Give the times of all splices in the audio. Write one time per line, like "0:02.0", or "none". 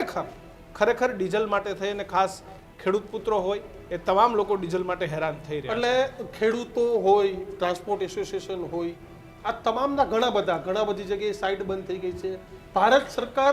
none